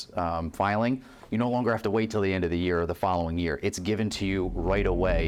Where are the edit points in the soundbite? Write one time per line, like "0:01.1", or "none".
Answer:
none